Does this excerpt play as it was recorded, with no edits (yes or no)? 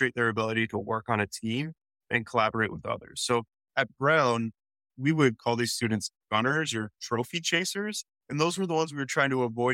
yes